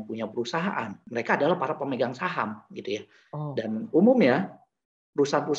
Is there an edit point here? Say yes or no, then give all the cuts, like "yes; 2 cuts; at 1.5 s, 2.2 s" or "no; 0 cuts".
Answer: yes; 1 cut; at 1.0 s